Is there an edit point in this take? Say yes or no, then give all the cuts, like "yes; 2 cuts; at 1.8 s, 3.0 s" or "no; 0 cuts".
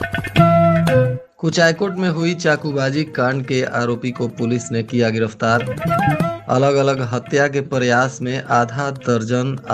yes; 1 cut; at 1.2 s